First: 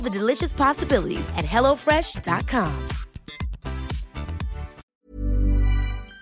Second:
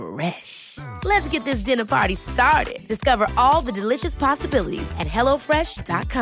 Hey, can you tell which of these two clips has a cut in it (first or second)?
first